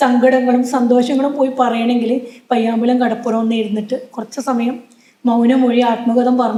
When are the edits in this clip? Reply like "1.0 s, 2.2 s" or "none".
none